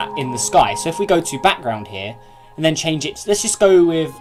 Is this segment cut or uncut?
uncut